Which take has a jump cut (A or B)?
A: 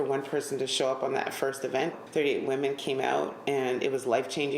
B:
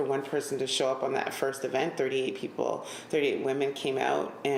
A